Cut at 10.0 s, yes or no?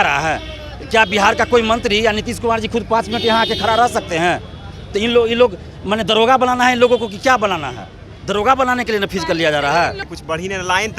yes